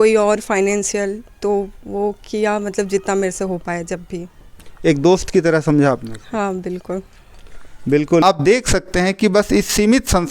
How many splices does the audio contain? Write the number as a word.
one